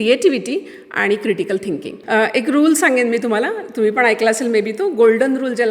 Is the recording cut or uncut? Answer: cut